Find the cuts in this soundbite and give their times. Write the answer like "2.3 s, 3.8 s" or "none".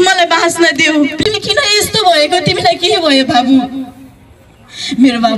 1.2 s